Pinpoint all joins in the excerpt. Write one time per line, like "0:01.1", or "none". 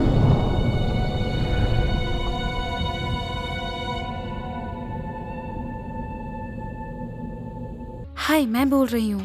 0:08.0